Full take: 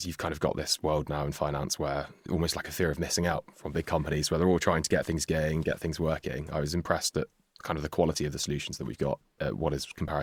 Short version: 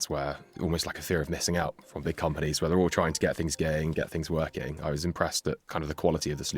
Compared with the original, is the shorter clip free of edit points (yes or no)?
no